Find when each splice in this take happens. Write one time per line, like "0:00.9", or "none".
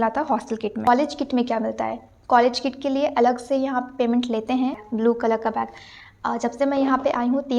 0:00.9
0:04.8